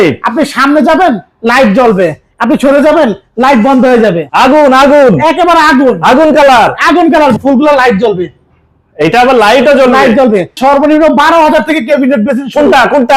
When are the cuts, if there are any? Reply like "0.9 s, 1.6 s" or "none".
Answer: 4.2 s, 7.4 s, 10.6 s

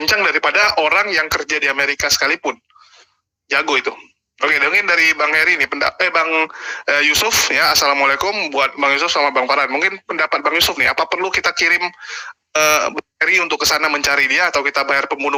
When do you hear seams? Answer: none

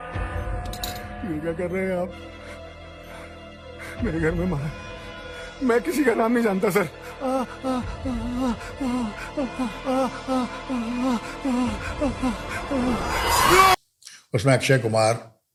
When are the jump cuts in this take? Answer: none

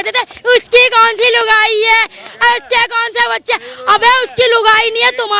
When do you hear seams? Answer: none

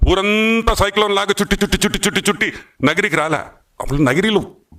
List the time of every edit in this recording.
none

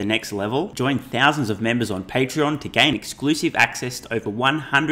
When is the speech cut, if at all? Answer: none

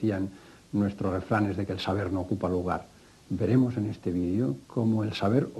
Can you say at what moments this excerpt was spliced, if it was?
none

